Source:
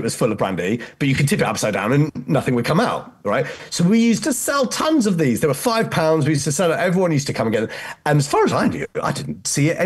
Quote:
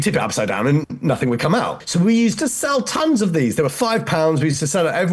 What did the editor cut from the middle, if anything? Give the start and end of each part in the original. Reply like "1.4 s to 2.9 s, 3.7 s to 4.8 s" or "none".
3.0 s to 3.6 s